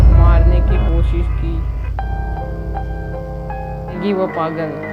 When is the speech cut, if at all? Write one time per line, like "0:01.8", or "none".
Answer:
0:04.0